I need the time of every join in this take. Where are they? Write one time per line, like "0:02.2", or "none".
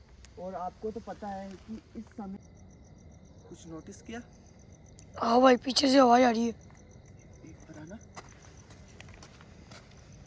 0:02.4